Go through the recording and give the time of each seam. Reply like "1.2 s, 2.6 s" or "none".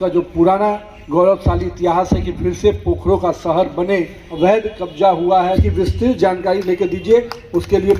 0.9 s, 4.2 s, 5.6 s